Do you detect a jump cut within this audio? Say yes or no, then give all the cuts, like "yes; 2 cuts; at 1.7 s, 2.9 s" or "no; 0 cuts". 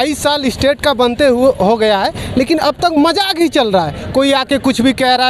no; 0 cuts